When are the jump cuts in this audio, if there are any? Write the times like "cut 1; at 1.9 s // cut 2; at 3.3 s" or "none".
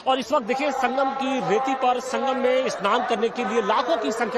cut 1; at 2.8 s